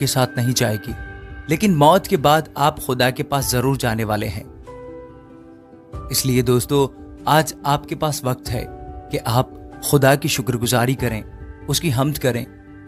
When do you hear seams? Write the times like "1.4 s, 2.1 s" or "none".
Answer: none